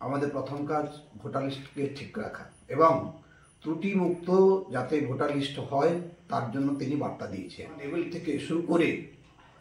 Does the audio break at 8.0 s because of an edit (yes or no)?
yes